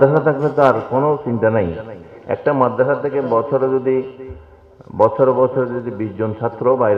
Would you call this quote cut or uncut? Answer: uncut